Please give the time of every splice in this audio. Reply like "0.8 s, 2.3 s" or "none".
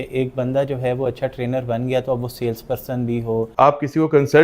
3.5 s